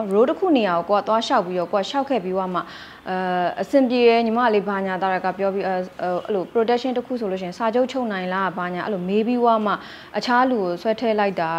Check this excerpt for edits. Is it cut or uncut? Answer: uncut